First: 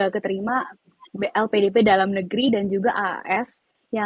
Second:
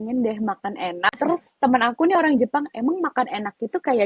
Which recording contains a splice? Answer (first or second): second